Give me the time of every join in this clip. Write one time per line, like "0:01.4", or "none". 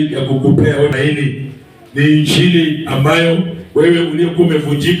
0:00.9